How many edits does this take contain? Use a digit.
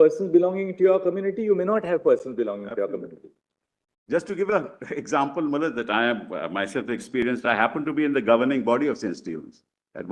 0